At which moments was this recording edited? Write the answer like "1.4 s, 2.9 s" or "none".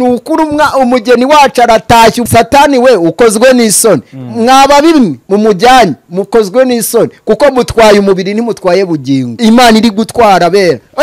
2.2 s, 9.3 s